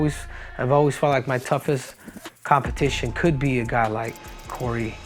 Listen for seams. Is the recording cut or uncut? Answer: uncut